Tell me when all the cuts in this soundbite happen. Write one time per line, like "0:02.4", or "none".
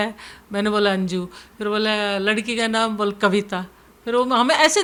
none